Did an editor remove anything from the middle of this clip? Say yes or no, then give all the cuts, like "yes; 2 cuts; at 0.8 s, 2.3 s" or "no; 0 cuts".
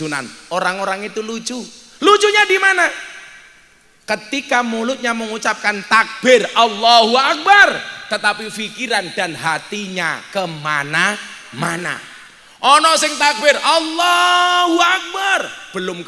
no; 0 cuts